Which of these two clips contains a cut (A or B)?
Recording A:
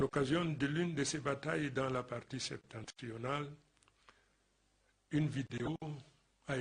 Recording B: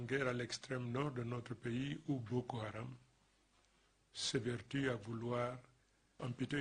B